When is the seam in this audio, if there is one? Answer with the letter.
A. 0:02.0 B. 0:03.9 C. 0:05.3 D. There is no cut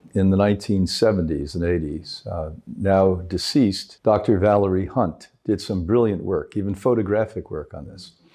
B